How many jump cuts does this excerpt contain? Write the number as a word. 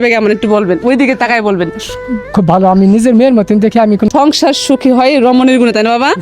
one